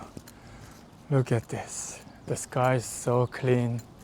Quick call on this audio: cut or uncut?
uncut